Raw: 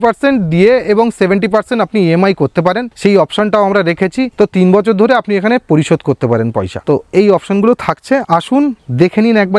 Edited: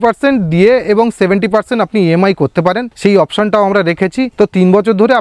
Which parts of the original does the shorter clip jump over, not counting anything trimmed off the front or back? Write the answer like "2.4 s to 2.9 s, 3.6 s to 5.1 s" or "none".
none